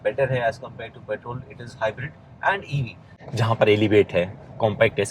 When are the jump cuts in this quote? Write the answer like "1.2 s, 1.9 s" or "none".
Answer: 3.2 s